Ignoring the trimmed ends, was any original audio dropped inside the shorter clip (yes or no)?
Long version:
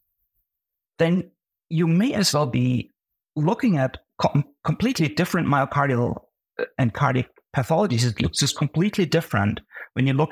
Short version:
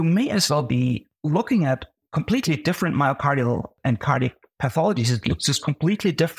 yes